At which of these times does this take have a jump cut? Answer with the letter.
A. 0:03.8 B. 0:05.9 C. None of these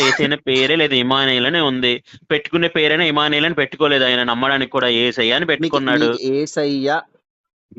C